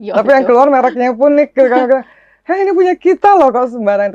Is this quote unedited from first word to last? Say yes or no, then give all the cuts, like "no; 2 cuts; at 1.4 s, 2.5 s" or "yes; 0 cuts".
yes; 0 cuts